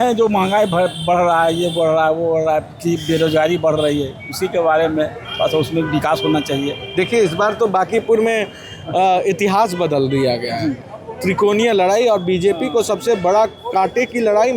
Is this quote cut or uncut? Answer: uncut